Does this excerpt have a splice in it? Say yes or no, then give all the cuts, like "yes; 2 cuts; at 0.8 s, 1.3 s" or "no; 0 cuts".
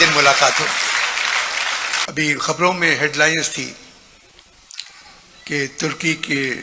yes; 1 cut; at 2.0 s